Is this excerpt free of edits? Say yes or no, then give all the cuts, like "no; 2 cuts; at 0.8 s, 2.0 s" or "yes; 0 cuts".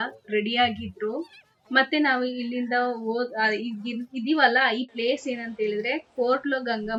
yes; 0 cuts